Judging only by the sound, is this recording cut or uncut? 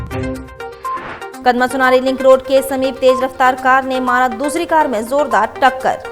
cut